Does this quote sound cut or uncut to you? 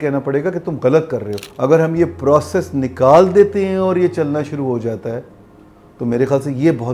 cut